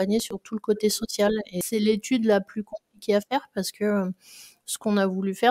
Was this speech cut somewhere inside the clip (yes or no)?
yes